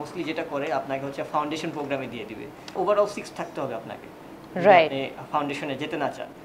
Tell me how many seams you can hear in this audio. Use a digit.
1